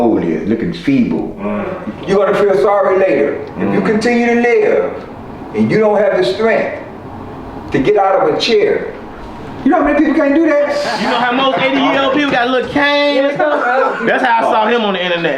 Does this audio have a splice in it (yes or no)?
yes